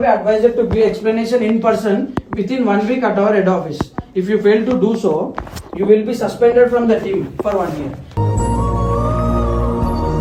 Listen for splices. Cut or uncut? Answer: uncut